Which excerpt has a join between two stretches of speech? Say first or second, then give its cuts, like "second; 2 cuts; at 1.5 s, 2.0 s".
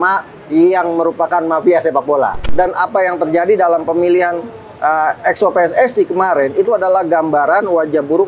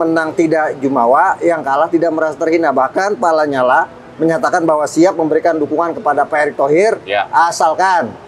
first; 1 cut; at 2.5 s